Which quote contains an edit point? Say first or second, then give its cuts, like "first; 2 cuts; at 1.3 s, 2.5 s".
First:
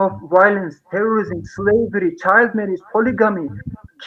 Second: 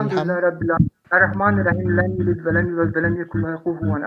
second; 1 cut; at 1.1 s